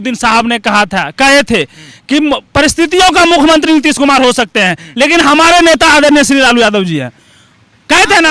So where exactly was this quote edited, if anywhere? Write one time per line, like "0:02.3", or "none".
none